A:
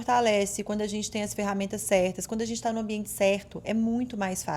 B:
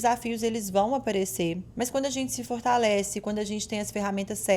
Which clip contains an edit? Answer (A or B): B